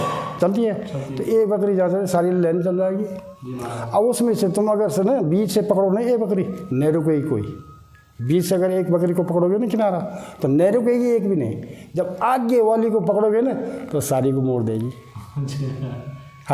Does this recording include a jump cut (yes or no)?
no